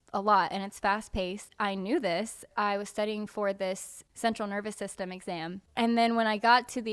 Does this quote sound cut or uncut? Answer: cut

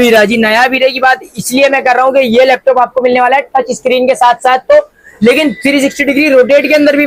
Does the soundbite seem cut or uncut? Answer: uncut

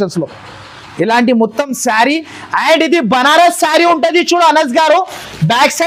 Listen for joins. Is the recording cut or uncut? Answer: uncut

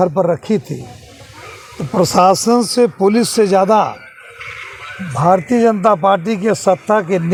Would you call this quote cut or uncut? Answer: uncut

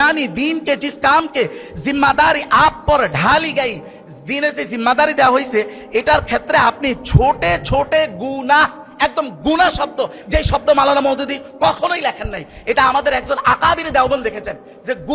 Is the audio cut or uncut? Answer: uncut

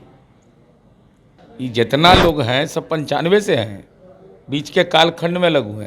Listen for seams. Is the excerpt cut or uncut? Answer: cut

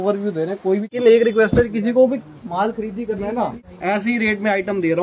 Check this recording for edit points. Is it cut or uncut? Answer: cut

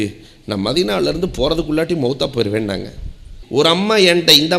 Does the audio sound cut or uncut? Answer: cut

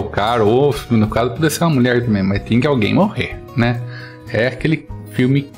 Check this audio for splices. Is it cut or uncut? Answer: uncut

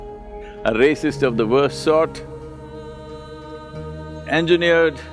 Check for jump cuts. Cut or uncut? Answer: uncut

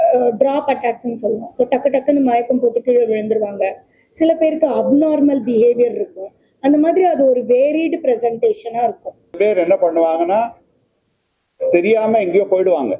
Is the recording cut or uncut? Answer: cut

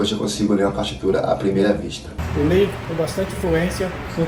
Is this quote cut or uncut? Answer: uncut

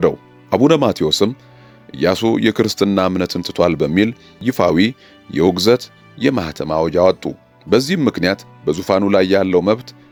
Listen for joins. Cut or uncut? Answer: uncut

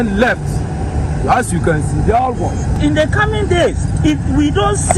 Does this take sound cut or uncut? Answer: uncut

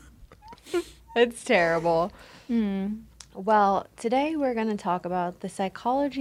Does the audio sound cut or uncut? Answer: uncut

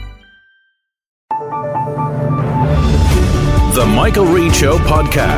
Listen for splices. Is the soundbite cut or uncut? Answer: cut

